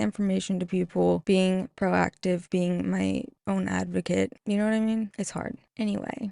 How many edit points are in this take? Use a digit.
2